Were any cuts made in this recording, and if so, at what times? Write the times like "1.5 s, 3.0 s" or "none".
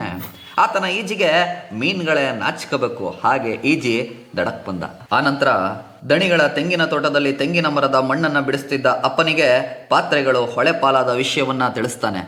none